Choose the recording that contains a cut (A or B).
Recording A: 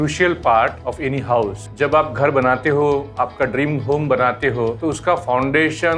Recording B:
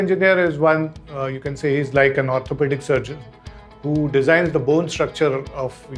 A